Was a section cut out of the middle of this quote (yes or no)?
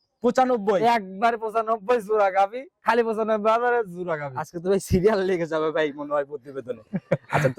yes